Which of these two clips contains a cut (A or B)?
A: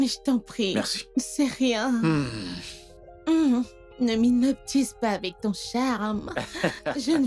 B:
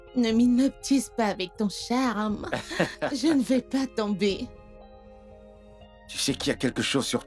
B